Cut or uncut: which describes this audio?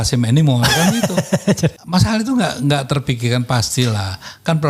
cut